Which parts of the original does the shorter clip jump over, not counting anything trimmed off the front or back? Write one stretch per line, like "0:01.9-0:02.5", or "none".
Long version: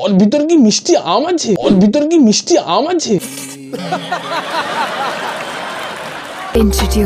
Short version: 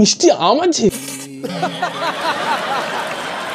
0:01.6-0:03.2